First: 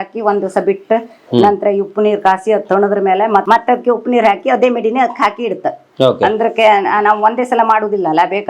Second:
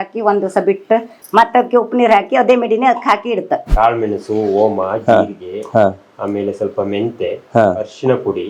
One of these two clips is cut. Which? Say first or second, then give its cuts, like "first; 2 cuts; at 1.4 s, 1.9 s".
second; 2 cuts; at 1.3 s, 3.7 s